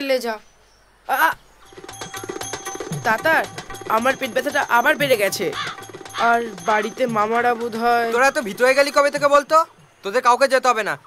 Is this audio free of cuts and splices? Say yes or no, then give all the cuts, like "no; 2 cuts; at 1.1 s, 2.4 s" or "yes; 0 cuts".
yes; 0 cuts